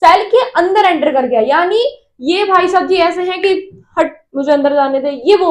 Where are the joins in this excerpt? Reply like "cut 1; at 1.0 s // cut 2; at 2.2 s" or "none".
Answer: none